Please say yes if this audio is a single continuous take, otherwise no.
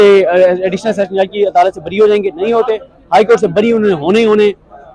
yes